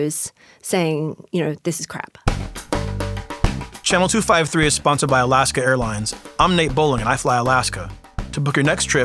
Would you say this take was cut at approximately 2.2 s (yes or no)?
yes